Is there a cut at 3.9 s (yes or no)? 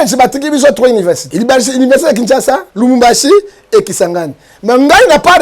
no